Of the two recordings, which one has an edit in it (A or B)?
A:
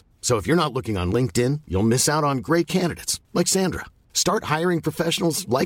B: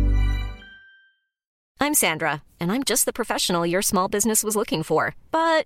B